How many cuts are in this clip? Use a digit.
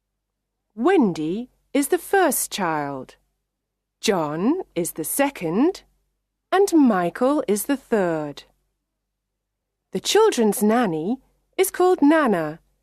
1